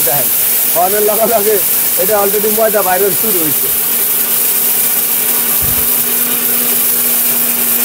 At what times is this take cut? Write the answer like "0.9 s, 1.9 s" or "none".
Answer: none